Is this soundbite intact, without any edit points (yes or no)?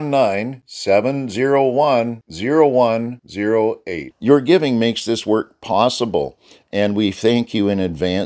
yes